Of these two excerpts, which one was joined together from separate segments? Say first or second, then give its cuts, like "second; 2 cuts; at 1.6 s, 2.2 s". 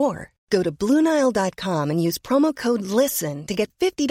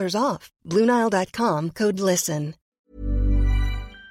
second; 1 cut; at 2.6 s